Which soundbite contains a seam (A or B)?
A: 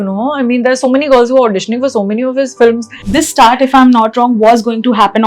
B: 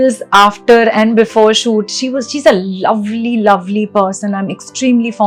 A